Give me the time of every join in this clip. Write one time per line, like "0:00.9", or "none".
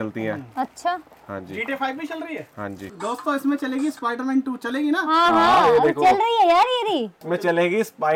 0:02.9